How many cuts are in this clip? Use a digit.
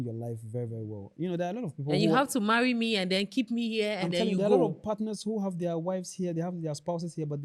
0